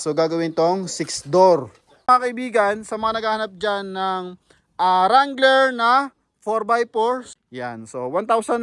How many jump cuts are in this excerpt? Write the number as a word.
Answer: two